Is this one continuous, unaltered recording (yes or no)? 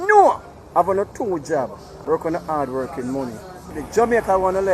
no